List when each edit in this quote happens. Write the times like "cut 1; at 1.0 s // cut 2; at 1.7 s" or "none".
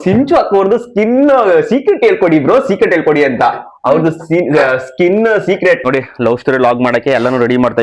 cut 1; at 5.8 s